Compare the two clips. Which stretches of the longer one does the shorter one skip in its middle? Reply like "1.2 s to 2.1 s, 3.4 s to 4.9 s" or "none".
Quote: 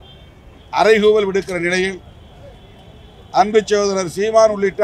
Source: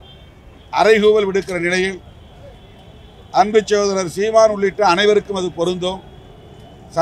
none